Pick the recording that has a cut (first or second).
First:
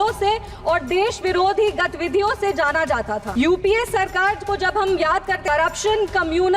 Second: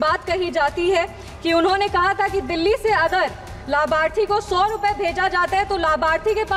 first